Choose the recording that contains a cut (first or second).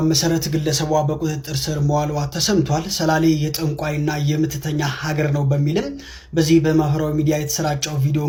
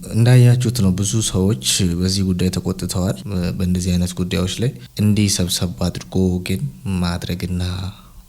second